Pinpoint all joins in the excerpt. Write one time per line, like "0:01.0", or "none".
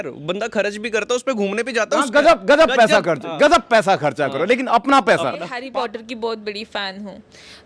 0:05.5